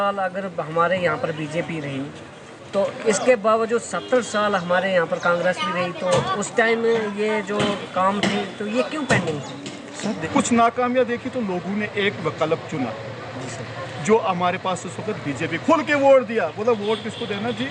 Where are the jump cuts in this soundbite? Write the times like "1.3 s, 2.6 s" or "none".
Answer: 10.2 s

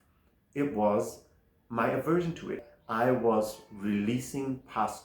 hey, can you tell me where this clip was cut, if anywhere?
2.6 s

